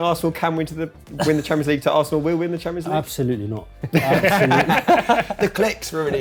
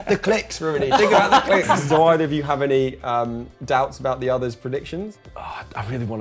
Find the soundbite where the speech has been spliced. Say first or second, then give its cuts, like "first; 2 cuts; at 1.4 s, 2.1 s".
second; 2 cuts; at 1.8 s, 5.2 s